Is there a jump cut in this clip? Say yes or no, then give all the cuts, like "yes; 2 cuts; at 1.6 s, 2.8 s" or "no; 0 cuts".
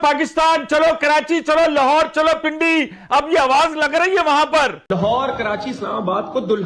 yes; 1 cut; at 4.8 s